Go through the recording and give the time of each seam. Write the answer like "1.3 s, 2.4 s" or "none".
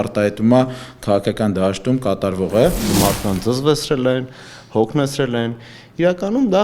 3.0 s

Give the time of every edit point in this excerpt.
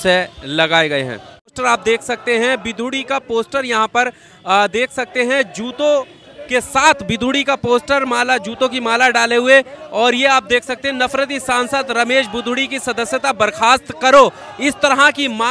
1.5 s

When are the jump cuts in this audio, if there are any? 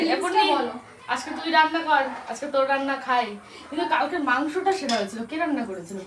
none

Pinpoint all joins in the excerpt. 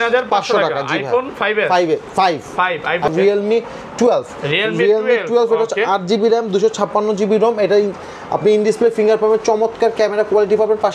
3.1 s

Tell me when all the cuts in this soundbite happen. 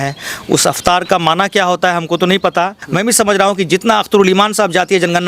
2.8 s

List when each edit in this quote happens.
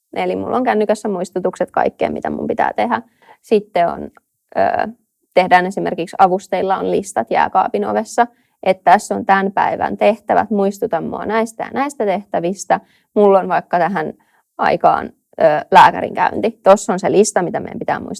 none

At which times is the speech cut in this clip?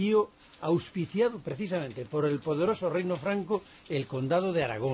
1.9 s

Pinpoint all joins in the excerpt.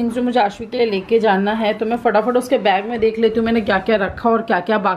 none

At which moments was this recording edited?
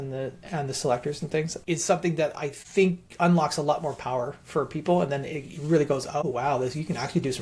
6.2 s

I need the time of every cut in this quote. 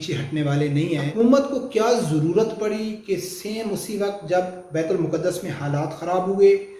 1.1 s

